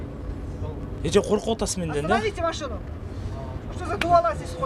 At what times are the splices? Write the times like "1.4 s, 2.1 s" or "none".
none